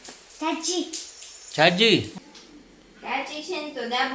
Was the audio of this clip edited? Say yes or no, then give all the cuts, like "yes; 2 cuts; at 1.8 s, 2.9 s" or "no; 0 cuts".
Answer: yes; 1 cut; at 2.1 s